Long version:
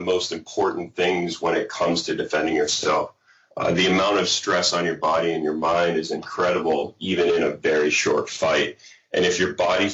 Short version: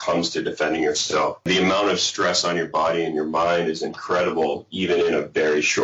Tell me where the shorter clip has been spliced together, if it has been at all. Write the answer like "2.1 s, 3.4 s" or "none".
1.5 s